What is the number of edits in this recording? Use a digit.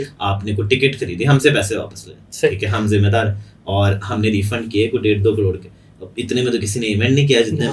0